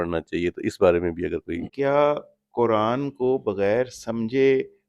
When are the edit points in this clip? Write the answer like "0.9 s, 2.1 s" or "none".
1.7 s